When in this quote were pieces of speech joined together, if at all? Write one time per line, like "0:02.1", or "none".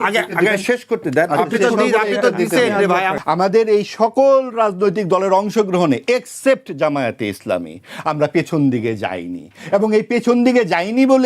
0:03.1